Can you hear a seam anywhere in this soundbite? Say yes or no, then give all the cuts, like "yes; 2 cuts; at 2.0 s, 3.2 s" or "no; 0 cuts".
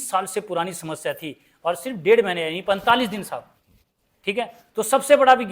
no; 0 cuts